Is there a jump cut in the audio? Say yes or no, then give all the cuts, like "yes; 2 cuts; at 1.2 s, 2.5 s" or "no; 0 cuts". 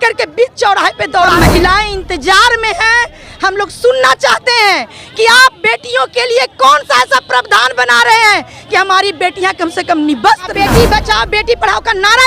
yes; 2 cuts; at 1.3 s, 10.5 s